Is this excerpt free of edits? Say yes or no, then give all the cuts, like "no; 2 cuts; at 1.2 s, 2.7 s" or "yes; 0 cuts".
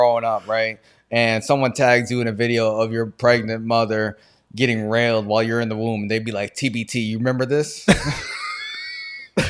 yes; 0 cuts